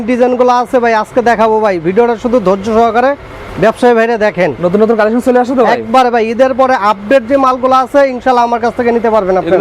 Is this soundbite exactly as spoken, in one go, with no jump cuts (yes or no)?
yes